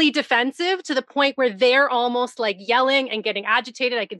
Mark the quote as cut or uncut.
uncut